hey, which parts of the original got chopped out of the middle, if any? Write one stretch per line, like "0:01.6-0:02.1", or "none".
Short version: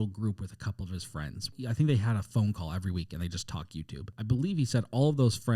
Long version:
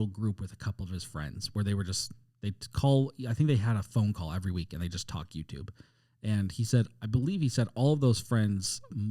0:01.5-0:03.1
0:05.7-0:07.0